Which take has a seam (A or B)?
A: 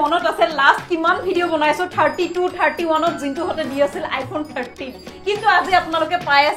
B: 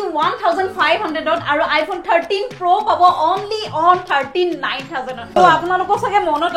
B